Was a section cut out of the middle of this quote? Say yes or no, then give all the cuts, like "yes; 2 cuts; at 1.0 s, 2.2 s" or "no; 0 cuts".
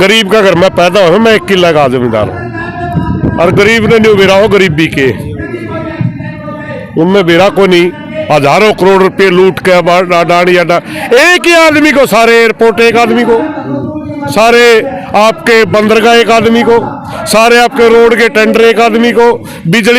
no; 0 cuts